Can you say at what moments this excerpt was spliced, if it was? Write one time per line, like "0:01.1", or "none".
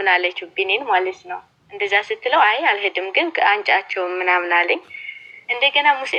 none